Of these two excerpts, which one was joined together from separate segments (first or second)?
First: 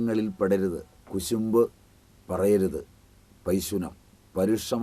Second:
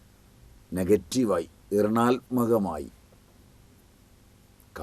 first